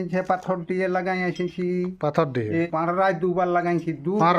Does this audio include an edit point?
yes; 1 cut; at 2.6 s

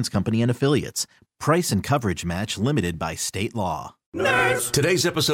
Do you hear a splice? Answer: yes; 1 cut; at 4.0 s

